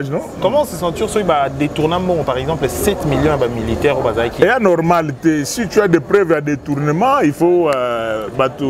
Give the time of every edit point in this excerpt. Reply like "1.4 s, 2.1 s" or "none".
none